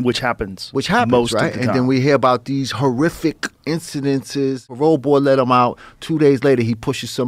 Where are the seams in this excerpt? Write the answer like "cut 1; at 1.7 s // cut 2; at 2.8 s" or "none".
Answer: cut 1; at 4.7 s